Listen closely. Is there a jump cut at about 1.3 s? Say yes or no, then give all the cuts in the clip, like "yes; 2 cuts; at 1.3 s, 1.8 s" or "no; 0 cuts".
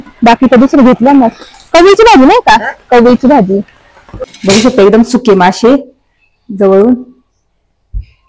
no; 1 cut; at 4.3 s